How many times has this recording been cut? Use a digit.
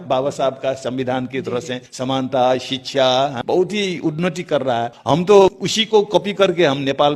4